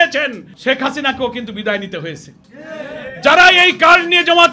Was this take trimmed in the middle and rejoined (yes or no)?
no